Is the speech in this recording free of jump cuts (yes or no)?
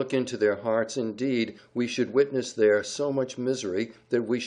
no